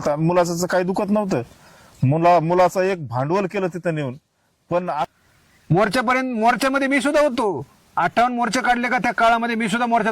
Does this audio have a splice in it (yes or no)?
yes